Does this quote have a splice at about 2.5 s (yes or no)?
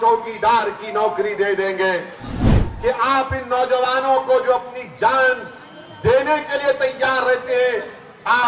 yes